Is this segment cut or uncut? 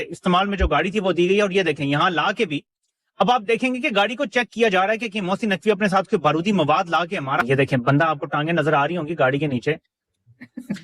uncut